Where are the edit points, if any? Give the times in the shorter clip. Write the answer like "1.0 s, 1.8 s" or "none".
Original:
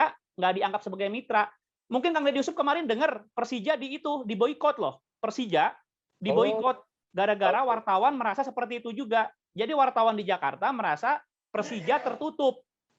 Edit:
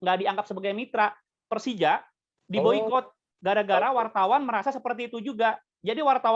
1.3 s